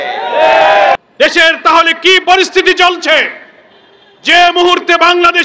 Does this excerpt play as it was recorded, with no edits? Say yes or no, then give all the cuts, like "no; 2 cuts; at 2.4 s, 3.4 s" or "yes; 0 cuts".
no; 1 cut; at 1.0 s